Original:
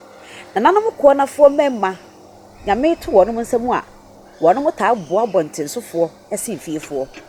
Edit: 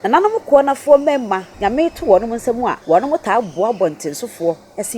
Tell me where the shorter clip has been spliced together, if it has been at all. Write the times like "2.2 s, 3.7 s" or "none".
1.5 s, 2.8 s